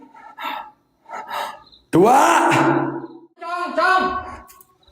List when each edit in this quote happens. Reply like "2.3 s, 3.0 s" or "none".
3.6 s